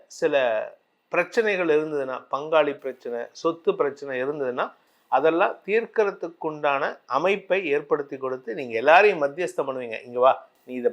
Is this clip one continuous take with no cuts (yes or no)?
yes